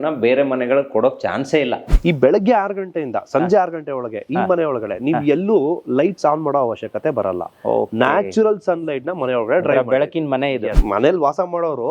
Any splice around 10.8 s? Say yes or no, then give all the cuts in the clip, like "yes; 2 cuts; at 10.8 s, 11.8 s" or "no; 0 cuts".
yes; 2 cuts; at 1.9 s, 10.8 s